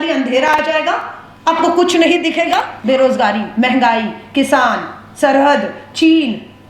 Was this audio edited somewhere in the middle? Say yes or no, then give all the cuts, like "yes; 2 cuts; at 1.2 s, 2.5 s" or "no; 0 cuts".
yes; 1 cut; at 2.7 s